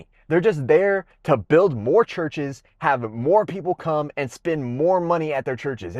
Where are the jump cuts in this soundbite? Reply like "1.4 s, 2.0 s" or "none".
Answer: none